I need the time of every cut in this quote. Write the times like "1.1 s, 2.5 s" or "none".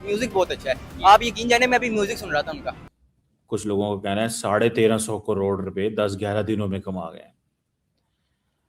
2.9 s